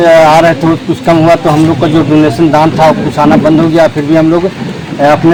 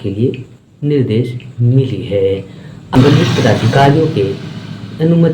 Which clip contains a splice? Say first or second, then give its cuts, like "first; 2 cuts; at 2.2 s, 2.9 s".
second; 1 cut; at 3.0 s